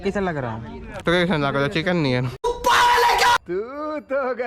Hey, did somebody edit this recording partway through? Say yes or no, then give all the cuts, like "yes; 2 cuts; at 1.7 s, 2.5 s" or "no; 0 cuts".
yes; 2 cuts; at 0.9 s, 2.4 s